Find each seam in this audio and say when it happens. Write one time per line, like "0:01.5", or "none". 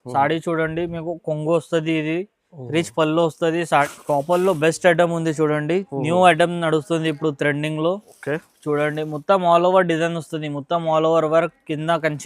0:03.6